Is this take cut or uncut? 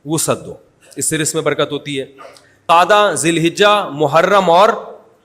cut